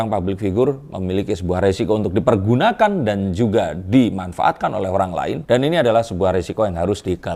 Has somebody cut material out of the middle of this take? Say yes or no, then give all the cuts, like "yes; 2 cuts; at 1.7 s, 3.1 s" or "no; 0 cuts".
no; 0 cuts